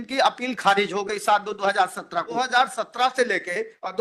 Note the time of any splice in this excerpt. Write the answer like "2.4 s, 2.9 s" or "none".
2.3 s